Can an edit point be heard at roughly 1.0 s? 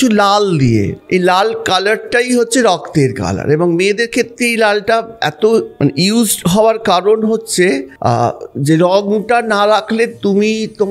yes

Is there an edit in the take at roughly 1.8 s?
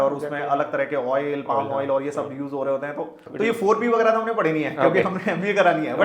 no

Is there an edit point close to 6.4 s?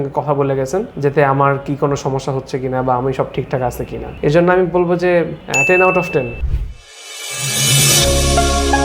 yes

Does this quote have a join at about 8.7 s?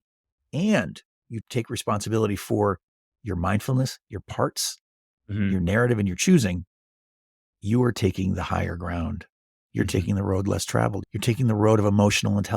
no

